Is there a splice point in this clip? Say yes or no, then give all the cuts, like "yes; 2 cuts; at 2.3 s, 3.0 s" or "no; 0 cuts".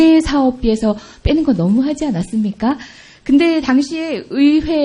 yes; 1 cut; at 1.9 s